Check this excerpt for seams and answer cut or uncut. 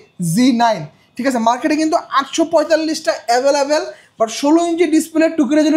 uncut